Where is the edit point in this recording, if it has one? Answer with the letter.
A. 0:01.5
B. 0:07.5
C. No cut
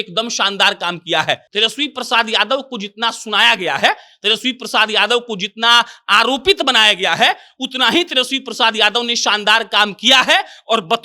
A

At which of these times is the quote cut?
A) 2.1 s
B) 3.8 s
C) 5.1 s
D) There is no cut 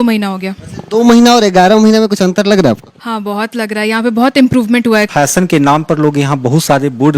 C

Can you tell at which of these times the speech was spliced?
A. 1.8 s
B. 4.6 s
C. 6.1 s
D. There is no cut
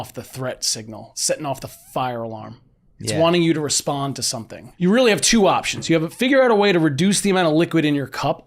B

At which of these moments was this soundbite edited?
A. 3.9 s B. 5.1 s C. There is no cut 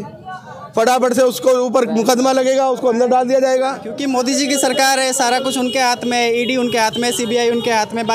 A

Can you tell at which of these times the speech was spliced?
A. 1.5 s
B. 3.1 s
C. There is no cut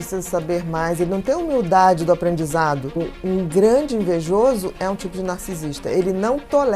B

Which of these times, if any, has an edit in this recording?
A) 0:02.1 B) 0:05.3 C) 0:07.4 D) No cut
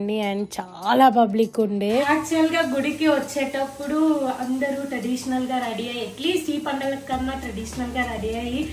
A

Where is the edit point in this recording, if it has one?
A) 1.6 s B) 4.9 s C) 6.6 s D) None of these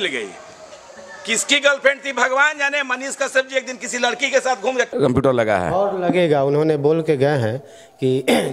B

